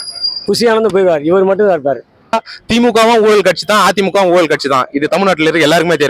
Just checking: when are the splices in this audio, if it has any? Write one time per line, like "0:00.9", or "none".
0:02.3